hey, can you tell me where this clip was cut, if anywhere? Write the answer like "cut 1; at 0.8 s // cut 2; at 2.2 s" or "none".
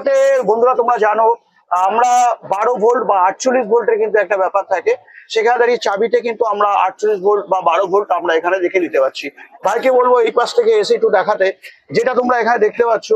none